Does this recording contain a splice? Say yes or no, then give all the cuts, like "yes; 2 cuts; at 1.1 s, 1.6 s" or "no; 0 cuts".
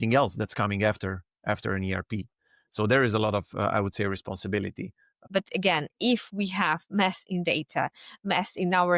yes; 1 cut; at 5.1 s